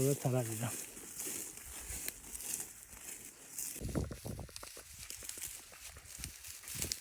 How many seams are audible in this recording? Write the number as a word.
one